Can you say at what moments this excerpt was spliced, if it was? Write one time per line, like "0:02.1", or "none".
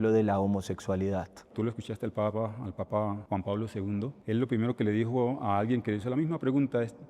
0:01.5